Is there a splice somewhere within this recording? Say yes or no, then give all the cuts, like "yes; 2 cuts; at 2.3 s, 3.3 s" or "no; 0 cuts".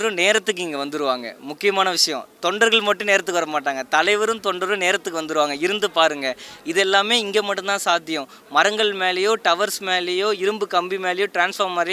no; 0 cuts